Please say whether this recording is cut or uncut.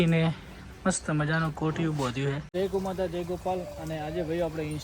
cut